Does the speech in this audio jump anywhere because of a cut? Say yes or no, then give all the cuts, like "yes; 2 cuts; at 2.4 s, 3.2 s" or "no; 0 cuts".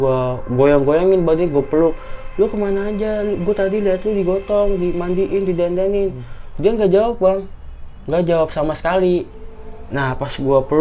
no; 0 cuts